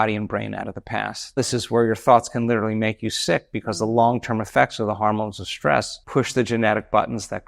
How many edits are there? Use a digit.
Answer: 2